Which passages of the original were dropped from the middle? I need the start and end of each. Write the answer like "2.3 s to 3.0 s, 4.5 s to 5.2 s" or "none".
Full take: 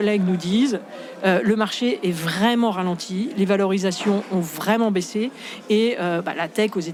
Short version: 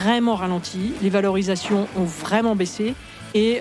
none